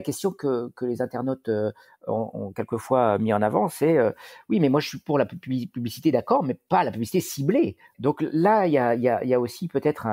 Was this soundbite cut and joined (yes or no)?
yes